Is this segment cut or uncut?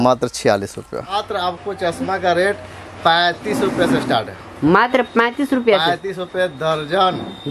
cut